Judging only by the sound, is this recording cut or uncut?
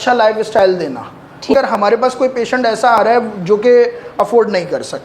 cut